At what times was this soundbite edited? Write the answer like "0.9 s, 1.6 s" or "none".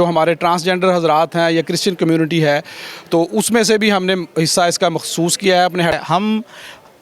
5.9 s

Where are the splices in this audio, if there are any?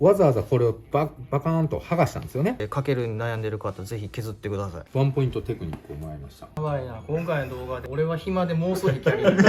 2.7 s, 4.8 s, 6.5 s

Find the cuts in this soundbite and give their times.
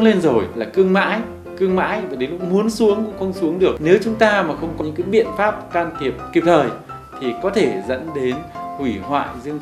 3.8 s, 4.8 s

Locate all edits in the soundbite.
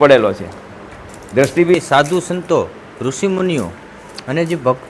1.7 s

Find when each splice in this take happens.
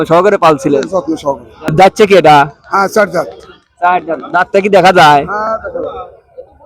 1.5 s

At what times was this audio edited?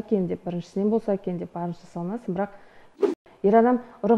3.0 s

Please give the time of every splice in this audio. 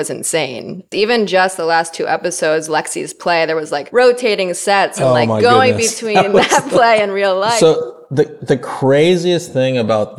0.9 s, 3.9 s, 5.0 s, 7.6 s

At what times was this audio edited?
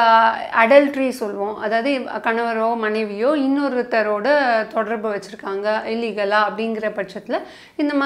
none

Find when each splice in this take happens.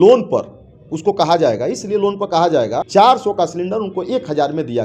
2.8 s

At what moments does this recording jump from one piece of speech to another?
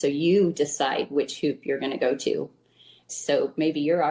none

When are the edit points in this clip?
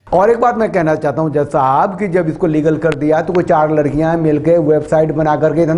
none

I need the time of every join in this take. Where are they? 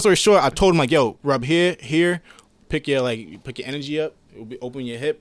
1.2 s

